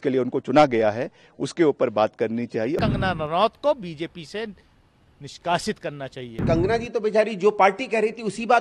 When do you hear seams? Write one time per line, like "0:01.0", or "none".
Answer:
0:02.8
0:06.4